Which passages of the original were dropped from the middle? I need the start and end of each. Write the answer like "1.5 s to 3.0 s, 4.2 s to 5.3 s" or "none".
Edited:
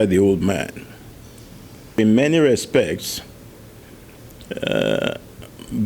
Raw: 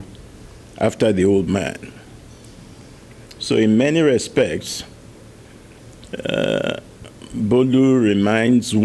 3.0 s to 3.6 s